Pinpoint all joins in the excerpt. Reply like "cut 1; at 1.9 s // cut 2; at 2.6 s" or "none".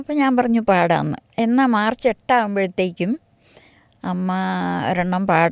none